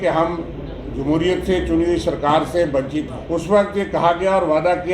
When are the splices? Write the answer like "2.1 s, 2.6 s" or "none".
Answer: 3.2 s